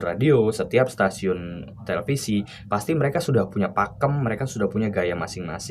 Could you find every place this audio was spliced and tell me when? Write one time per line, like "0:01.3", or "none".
none